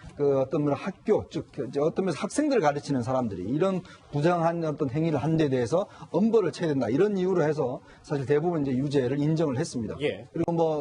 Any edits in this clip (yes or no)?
no